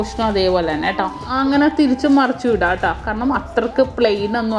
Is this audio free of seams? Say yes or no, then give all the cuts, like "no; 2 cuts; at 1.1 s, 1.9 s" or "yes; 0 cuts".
no; 1 cut; at 1.2 s